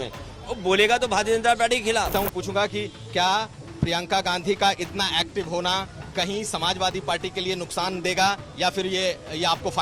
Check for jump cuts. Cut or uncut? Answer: cut